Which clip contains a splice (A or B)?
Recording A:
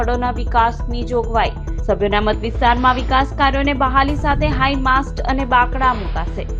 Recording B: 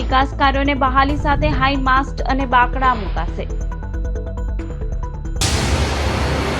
B